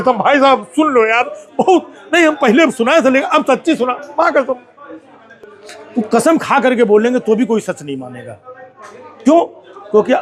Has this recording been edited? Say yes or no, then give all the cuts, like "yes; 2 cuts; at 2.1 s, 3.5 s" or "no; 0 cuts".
no; 0 cuts